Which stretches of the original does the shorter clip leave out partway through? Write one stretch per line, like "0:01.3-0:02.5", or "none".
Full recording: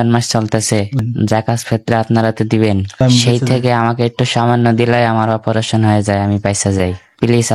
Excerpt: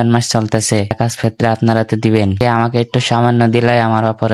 0:00.9-0:01.4
0:02.9-0:03.6